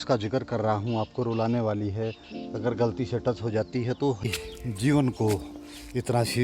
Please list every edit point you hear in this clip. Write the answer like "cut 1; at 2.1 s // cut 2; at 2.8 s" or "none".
cut 1; at 4.2 s